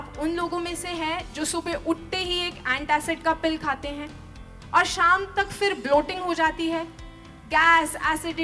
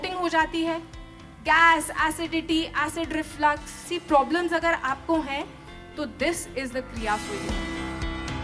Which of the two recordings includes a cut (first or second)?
second